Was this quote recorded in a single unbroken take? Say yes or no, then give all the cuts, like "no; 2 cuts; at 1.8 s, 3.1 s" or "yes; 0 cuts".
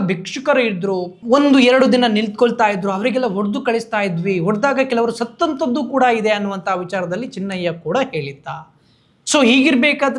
yes; 0 cuts